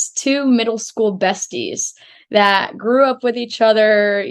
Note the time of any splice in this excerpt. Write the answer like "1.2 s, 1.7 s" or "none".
none

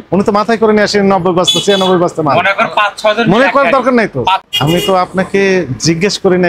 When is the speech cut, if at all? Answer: 4.4 s

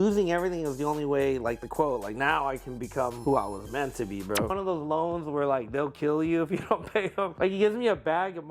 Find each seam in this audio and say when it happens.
3.2 s, 4.5 s, 7.3 s

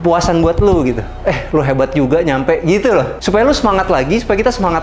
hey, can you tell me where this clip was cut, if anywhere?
1.1 s, 3.2 s

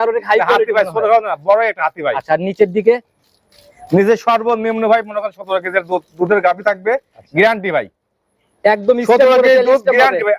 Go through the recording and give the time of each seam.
none

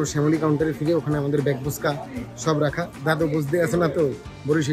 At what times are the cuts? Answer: none

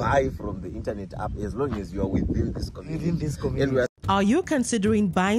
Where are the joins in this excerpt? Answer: 3.9 s

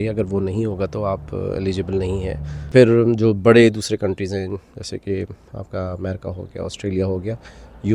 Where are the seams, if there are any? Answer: 2.7 s

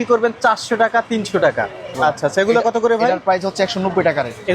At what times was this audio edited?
2.0 s

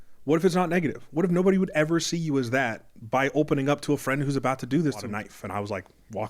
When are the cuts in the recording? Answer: 5.1 s

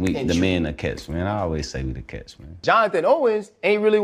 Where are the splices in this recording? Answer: 2.6 s

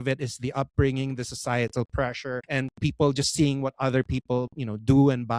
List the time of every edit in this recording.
2.4 s

